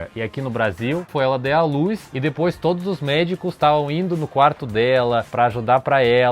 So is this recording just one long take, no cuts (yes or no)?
no